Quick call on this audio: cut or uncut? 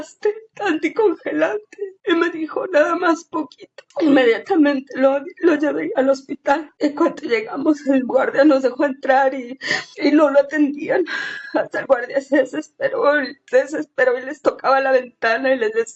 uncut